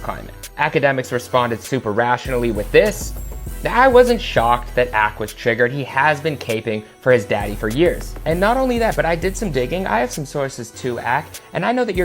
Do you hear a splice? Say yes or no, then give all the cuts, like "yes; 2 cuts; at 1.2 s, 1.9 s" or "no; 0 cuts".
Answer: yes; 1 cut; at 10.9 s